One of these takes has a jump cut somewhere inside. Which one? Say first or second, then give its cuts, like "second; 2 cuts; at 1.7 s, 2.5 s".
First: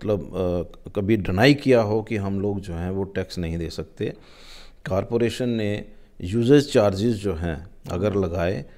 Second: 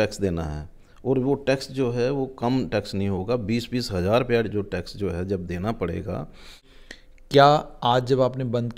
second; 1 cut; at 6.7 s